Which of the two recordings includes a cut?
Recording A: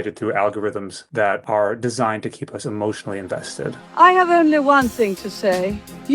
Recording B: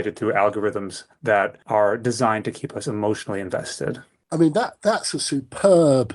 A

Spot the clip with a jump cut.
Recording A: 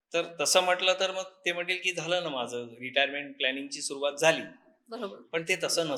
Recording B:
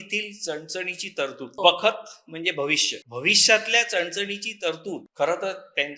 B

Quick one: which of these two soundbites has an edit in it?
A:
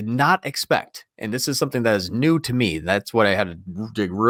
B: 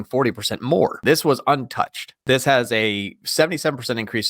B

